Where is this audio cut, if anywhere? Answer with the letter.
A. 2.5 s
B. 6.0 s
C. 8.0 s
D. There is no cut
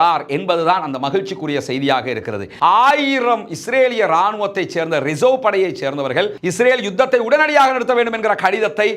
A